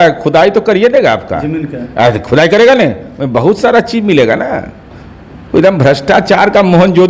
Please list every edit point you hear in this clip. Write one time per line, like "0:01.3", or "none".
none